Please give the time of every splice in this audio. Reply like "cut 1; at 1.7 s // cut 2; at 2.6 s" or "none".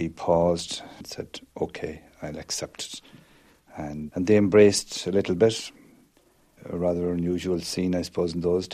cut 1; at 1.0 s // cut 2; at 4.1 s